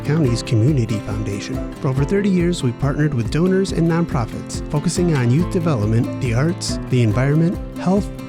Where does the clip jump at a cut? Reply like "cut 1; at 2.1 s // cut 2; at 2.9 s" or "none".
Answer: none